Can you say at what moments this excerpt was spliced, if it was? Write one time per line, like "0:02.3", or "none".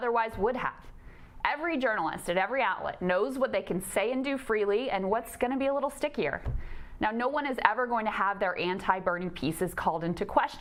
none